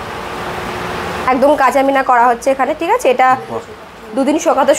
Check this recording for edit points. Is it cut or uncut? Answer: cut